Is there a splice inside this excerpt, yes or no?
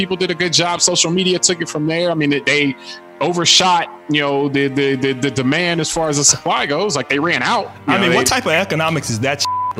no